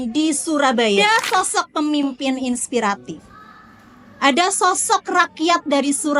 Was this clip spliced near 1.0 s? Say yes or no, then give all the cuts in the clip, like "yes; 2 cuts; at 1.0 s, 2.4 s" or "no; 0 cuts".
yes; 1 cut; at 1.0 s